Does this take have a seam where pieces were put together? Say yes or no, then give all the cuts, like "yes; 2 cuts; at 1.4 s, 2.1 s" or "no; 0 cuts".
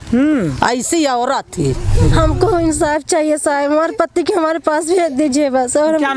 yes; 1 cut; at 2.1 s